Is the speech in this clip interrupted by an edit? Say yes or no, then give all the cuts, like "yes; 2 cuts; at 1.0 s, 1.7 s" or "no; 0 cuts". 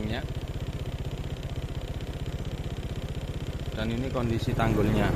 no; 0 cuts